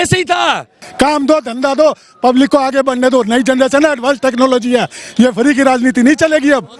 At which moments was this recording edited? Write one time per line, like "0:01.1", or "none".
0:00.9

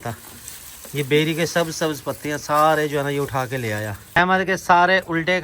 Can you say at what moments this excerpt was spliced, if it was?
0:03.9

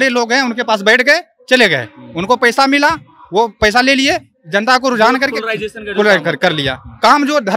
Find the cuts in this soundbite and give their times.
none

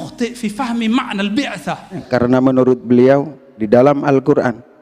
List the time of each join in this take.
0:02.0

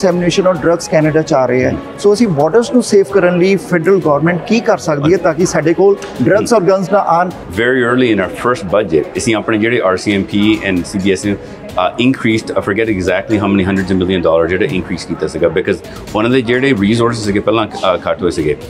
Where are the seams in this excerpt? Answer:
0:07.4

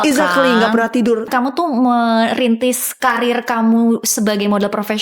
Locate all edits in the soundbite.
0:01.3
0:02.9

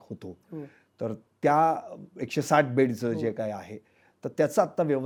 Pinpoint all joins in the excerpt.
none

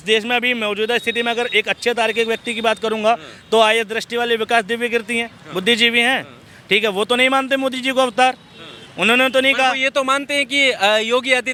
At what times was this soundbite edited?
none

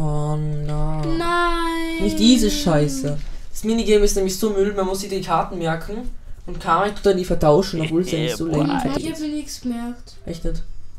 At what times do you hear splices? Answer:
0:09.0

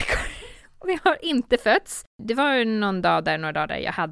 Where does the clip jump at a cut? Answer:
0:02.2

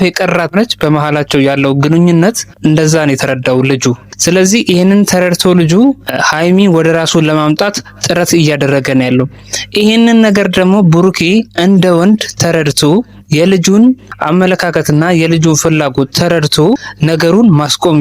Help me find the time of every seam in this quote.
0:14.1
0:16.9

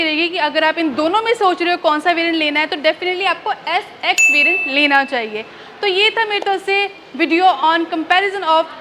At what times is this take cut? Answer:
none

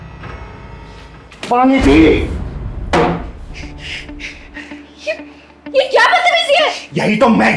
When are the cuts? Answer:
0:01.5

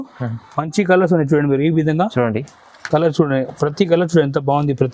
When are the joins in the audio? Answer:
none

